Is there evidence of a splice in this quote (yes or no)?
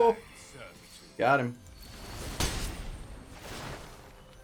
no